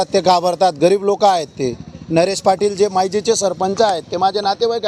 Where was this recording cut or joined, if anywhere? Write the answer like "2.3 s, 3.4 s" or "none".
none